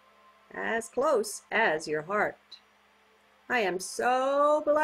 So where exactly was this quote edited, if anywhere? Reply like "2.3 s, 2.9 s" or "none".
none